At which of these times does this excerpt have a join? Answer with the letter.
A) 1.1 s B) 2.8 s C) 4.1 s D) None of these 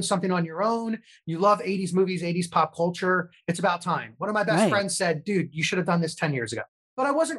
D